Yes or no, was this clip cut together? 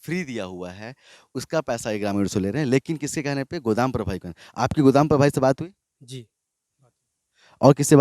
no